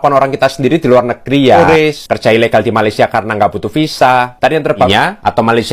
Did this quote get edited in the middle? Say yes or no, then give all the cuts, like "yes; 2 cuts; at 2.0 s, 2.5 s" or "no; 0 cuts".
yes; 2 cuts; at 1.6 s, 4.9 s